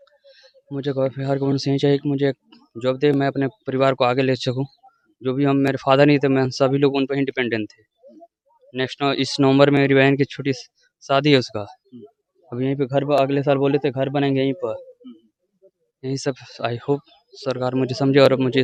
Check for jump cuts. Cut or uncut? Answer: uncut